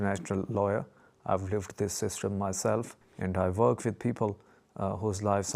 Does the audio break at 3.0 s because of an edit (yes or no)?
yes